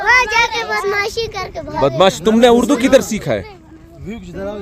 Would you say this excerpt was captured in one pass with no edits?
yes; 0 cuts

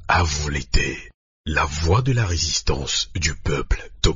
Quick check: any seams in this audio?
no; 0 cuts

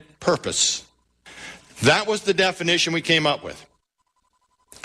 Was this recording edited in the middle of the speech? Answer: no; 0 cuts

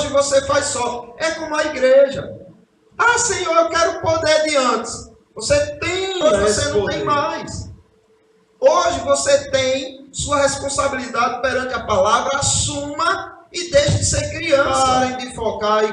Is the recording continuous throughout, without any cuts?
no; 2 cuts; at 7.0 s, 14.7 s

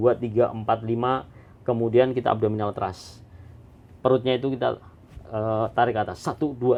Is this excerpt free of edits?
yes; 0 cuts

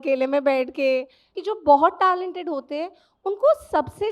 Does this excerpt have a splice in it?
yes; 1 cut; at 1.3 s

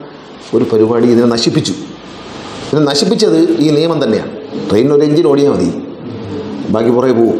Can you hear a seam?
yes; 1 cut; at 4.4 s

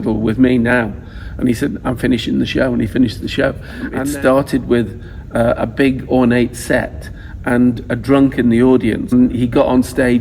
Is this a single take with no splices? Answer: no; 2 cuts; at 3.9 s, 9.1 s

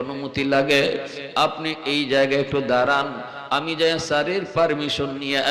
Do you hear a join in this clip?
no; 0 cuts

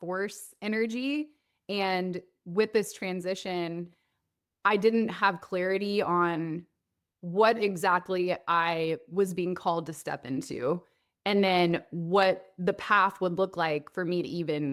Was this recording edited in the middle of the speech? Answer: no; 0 cuts

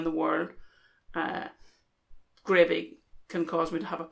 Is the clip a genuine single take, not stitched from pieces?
yes; 0 cuts

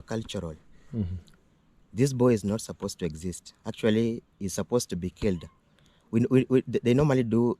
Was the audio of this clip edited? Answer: no; 0 cuts

